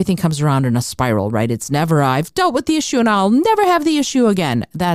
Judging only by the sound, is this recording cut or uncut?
uncut